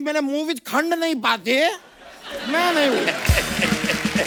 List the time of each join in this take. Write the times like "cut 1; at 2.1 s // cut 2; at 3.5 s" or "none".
none